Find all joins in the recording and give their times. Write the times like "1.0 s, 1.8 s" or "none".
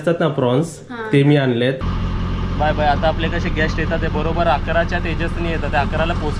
1.8 s